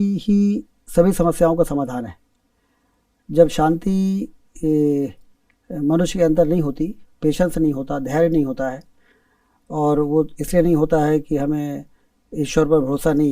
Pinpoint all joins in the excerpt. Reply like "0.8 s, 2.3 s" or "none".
none